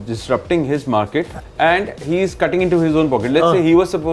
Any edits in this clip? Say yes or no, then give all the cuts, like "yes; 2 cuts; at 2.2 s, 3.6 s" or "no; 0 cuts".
yes; 1 cut; at 1.4 s